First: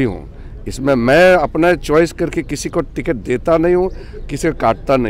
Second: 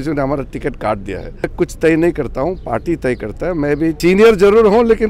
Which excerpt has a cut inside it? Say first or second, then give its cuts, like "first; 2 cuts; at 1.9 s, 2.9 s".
second; 2 cuts; at 1.4 s, 4.0 s